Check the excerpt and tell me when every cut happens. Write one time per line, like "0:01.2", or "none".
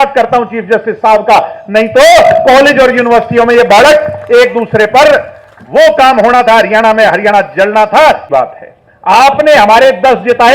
0:08.2